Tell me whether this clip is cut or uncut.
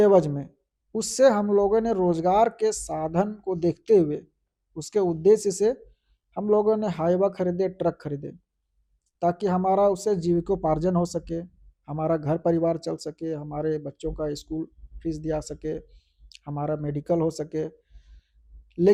uncut